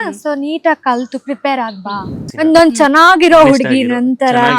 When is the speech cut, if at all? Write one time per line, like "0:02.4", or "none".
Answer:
0:02.2